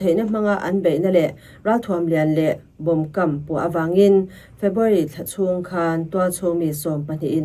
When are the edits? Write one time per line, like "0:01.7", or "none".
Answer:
none